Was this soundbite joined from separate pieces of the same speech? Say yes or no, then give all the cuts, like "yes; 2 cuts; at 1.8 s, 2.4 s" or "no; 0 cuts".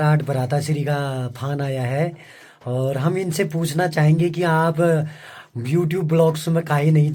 no; 0 cuts